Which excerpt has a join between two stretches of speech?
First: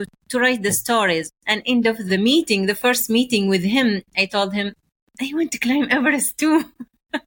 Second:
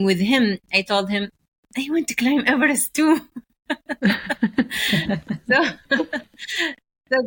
first; 1 cut; at 2.0 s

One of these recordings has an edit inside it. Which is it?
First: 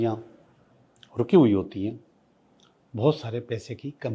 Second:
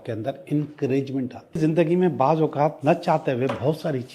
second; 1 cut; at 1.6 s

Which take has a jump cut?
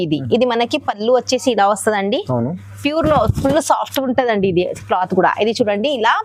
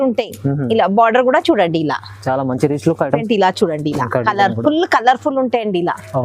second; 1 cut; at 3.2 s

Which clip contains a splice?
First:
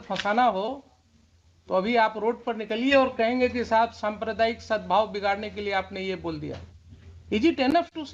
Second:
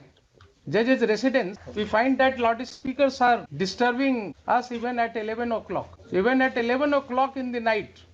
second; 4 cuts; at 1.6 s, 3.5 s, 4.3 s, 6.0 s

